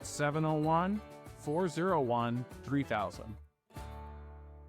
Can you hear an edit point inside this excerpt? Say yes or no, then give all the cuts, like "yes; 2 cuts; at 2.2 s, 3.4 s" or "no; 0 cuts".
yes; 1 cut; at 3.4 s